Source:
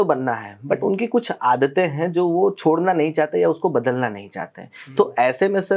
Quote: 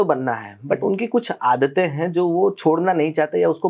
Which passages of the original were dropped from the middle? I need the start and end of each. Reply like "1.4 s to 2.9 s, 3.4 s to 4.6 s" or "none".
none